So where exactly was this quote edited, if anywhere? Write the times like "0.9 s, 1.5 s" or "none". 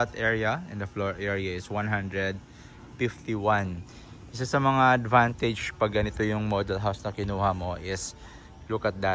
none